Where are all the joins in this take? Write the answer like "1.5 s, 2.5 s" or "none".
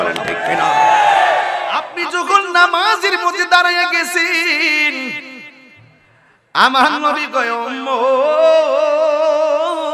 1.9 s